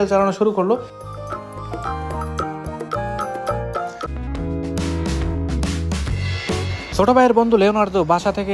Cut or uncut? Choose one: cut